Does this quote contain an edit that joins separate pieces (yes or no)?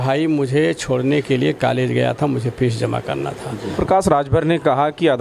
yes